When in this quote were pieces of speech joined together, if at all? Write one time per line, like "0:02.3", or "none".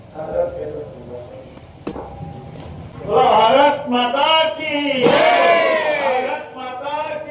0:01.9